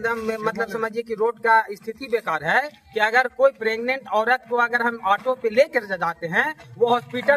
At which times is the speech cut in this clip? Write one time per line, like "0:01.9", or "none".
none